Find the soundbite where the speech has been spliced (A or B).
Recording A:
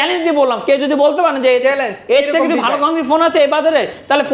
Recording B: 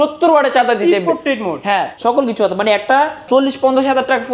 B